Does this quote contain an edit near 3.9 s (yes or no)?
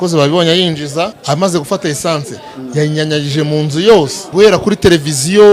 yes